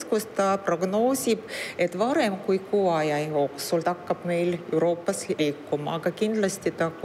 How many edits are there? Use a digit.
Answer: 2